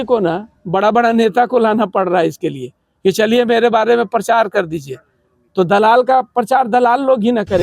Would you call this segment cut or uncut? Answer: uncut